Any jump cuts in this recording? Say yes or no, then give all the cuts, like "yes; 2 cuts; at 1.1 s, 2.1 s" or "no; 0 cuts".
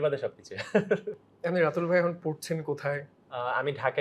no; 0 cuts